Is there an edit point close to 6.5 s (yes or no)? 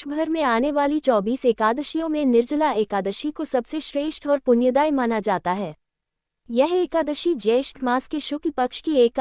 no